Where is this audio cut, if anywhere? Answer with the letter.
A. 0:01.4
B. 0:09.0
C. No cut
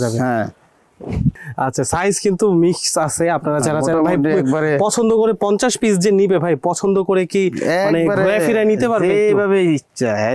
A